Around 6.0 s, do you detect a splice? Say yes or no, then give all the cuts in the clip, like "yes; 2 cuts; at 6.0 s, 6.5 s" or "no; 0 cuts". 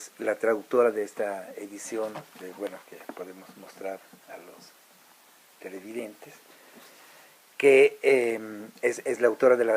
no; 1 cut; at 8.0 s